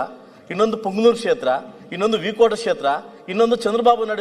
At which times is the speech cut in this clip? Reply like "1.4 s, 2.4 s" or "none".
none